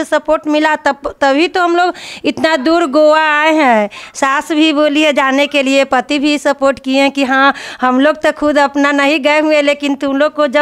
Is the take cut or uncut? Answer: uncut